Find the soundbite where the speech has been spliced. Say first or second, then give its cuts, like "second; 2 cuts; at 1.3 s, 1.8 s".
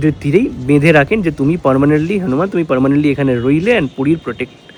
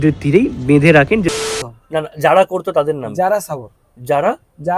second; 1 cut; at 1.3 s